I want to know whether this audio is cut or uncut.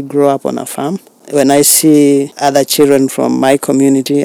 cut